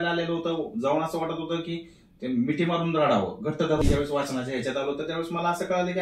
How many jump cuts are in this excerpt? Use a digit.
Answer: 1